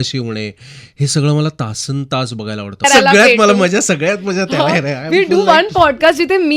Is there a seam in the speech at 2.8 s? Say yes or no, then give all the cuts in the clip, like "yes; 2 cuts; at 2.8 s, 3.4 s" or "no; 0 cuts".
yes; 1 cut; at 2.8 s